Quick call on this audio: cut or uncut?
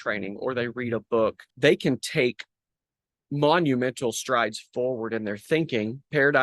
cut